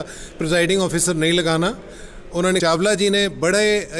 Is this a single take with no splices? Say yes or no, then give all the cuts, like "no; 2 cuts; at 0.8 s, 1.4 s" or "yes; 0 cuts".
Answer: no; 1 cut; at 2.6 s